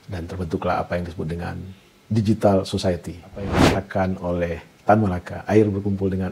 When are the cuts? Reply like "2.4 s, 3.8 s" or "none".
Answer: 3.5 s